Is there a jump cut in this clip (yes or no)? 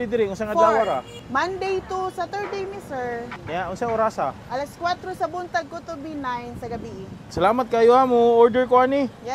yes